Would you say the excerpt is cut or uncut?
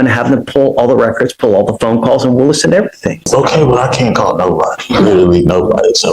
cut